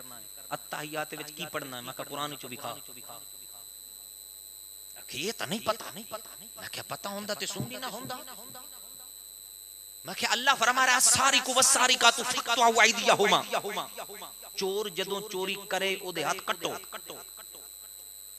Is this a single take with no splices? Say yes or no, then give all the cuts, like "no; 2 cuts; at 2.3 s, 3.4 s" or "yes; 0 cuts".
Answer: yes; 0 cuts